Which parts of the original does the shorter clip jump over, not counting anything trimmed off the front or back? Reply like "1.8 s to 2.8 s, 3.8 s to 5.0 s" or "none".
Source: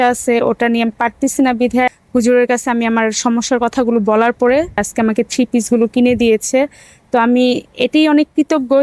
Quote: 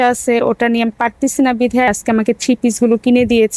2.0 s to 4.9 s